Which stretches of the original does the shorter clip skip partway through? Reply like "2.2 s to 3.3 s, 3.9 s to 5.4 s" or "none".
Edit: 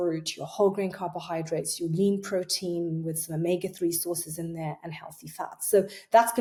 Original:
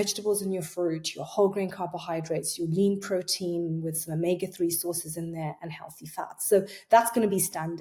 none